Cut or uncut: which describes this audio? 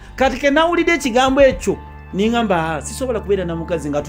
uncut